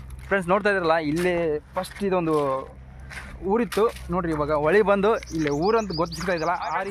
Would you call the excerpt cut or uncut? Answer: uncut